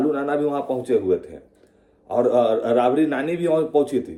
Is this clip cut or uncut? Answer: uncut